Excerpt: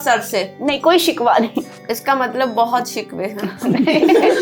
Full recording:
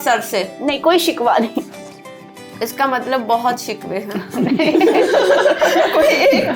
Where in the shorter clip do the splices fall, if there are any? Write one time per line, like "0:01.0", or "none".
0:01.8